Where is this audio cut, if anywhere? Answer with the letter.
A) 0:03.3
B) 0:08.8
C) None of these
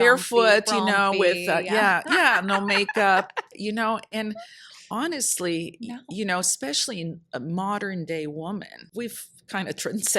B